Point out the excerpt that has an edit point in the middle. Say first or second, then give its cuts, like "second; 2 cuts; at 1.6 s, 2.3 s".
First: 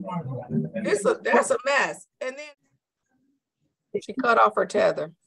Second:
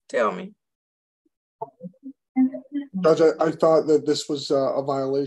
first; 1 cut; at 2.2 s